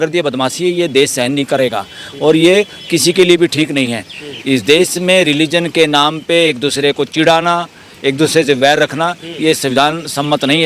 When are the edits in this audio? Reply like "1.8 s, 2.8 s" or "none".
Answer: none